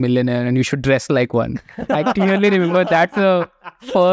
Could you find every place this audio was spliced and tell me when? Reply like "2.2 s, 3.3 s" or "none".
none

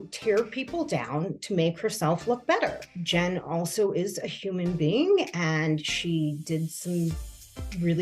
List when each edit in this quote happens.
2.9 s

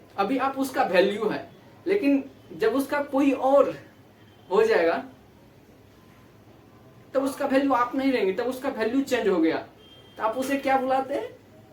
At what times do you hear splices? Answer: none

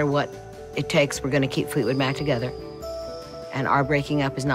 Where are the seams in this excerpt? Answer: none

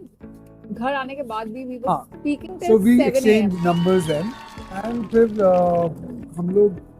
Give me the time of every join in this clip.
none

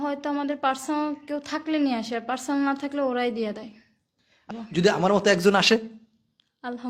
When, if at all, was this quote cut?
4.5 s

